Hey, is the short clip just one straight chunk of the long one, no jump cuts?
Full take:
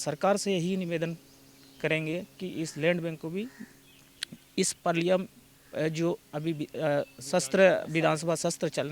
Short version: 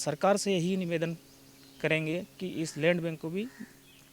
yes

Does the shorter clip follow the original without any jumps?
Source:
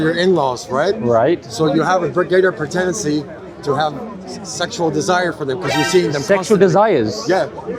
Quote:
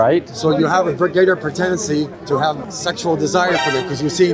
no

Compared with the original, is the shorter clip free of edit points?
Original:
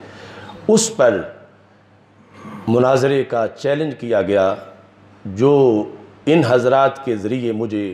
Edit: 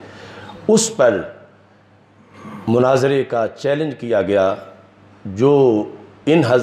yes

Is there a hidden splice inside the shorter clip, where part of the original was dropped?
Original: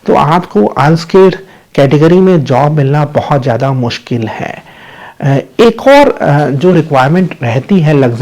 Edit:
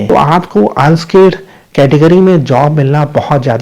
no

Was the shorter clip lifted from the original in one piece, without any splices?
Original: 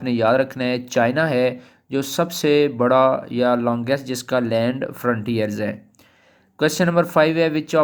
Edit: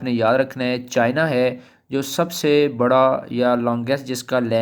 yes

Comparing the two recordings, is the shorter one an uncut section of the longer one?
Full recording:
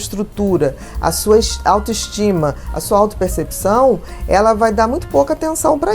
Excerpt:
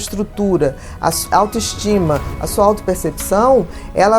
no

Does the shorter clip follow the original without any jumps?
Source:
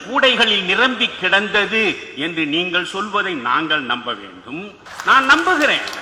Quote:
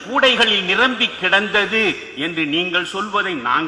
yes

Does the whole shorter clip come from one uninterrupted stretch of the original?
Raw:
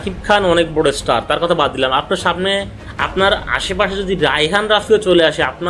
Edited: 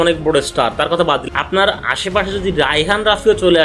no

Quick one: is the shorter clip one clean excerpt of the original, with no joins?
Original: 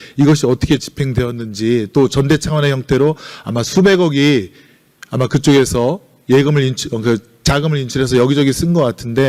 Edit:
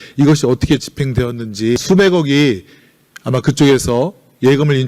no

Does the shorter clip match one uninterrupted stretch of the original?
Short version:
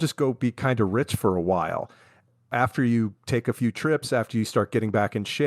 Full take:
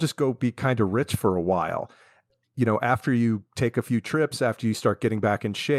no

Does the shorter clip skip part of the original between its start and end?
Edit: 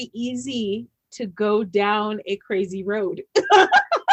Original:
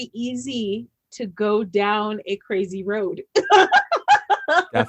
no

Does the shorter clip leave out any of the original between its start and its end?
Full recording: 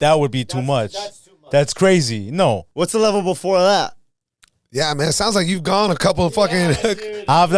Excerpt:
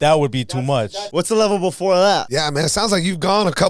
yes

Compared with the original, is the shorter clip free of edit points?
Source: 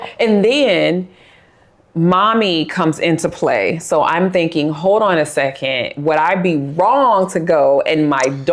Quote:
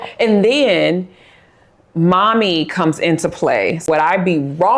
no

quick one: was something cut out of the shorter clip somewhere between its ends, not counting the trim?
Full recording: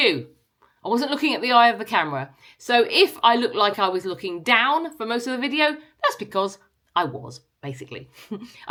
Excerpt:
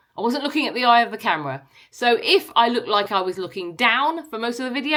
no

